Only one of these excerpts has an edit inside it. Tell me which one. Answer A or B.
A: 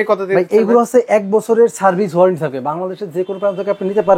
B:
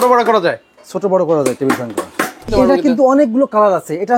B